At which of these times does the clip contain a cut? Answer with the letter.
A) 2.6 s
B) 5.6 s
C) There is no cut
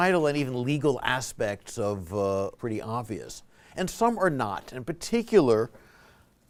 C